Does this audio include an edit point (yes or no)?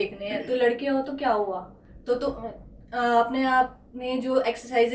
no